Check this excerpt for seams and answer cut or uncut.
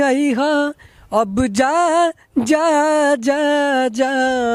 uncut